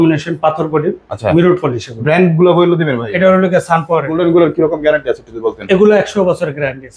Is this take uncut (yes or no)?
no